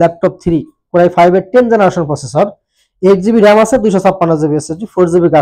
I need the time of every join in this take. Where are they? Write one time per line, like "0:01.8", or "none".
none